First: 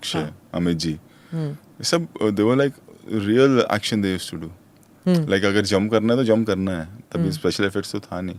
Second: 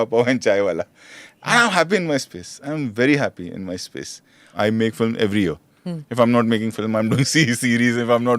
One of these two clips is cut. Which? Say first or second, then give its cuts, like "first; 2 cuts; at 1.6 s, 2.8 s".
second; 1 cut; at 4.4 s